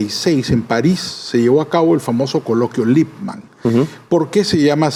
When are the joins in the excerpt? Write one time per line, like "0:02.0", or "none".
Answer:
none